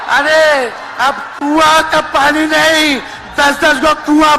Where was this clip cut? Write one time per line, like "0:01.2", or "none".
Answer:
none

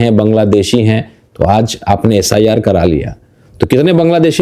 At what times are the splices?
none

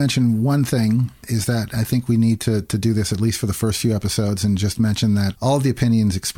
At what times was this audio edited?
0:01.2
0:05.3

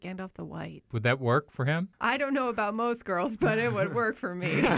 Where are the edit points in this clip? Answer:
0:00.9
0:01.9

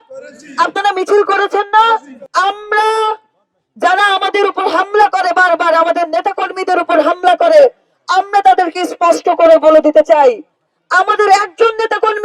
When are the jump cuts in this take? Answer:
0:02.2

